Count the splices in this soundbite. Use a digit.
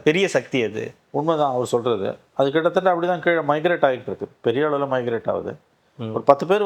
0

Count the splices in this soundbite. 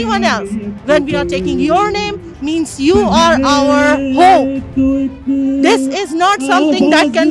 0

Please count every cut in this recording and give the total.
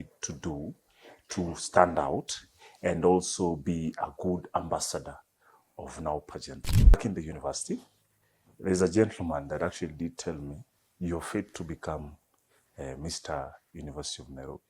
1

